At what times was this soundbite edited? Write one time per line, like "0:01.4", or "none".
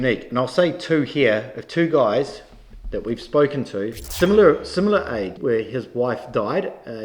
0:04.0
0:05.4